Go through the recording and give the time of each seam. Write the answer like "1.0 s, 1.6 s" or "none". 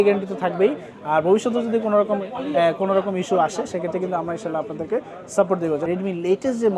5.8 s